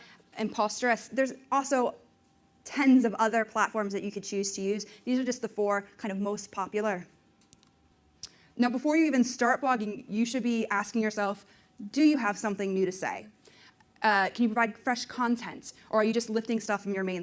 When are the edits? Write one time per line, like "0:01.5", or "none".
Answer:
0:08.7